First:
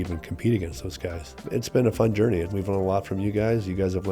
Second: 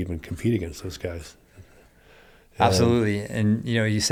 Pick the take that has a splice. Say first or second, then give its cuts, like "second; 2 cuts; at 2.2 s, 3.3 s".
first; 2 cuts; at 1.4 s, 2.5 s